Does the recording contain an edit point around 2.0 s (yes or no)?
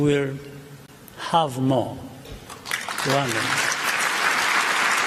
no